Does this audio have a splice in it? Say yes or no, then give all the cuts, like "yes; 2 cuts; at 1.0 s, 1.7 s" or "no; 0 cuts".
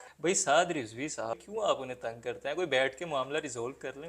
yes; 1 cut; at 1.3 s